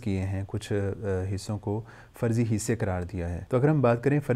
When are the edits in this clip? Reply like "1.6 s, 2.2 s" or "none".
3.3 s